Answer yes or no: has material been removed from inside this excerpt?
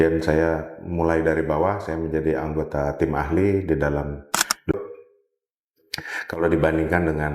yes